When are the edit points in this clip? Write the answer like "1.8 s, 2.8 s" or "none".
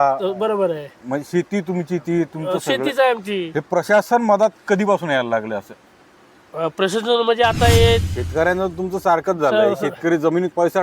8.2 s